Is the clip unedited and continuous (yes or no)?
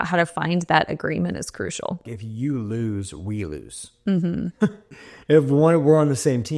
no